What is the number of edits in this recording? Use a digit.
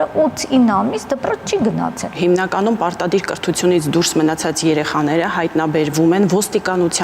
1